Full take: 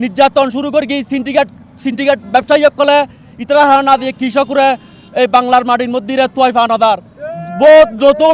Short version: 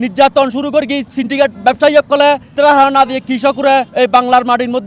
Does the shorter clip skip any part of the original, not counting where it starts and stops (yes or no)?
yes